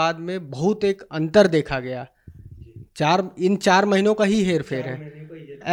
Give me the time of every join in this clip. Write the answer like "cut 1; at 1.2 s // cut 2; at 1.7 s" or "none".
none